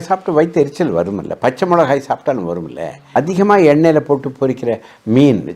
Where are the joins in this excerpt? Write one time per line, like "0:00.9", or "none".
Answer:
none